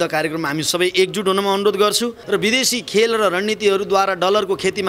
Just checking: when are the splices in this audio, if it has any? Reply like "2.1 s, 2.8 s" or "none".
2.2 s